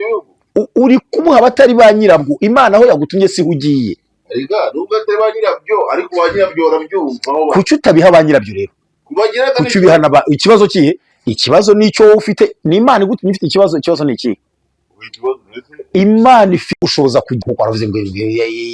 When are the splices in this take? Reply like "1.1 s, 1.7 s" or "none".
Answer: 17.3 s